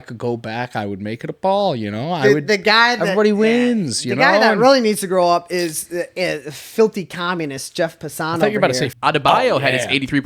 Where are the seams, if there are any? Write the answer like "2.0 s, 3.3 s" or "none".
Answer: 8.9 s